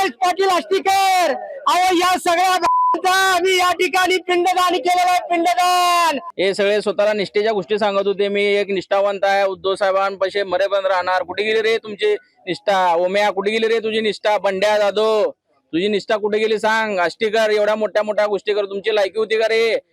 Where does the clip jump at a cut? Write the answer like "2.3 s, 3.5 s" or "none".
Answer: 6.3 s